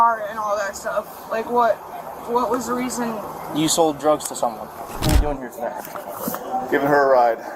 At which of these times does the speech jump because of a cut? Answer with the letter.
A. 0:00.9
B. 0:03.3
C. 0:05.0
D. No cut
C